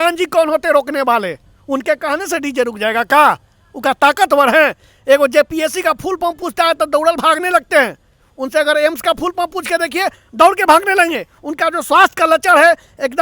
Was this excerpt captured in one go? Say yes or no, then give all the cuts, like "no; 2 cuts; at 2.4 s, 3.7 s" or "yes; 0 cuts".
yes; 0 cuts